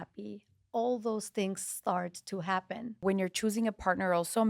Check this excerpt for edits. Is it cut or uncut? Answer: cut